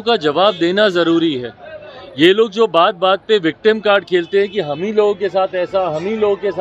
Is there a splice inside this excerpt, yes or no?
no